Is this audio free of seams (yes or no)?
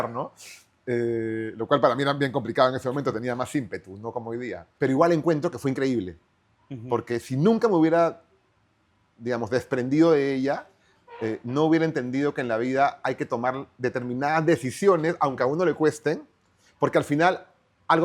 no